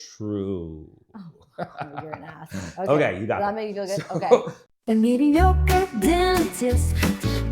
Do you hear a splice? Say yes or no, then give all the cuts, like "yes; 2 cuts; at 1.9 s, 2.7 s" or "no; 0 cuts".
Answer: yes; 1 cut; at 4.6 s